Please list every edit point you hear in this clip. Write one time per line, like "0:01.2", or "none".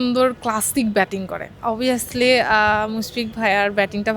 0:01.6